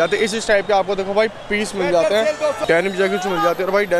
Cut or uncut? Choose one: cut